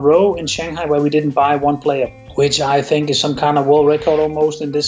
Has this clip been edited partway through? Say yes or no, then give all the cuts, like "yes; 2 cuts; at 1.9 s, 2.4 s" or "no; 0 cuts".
yes; 1 cut; at 2.2 s